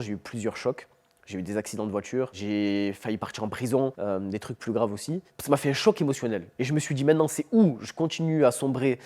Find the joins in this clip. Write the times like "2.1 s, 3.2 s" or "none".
2.4 s, 5.2 s